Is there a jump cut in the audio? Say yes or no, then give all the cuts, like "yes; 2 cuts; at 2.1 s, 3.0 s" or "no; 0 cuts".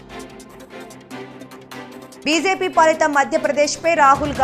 yes; 1 cut; at 1.4 s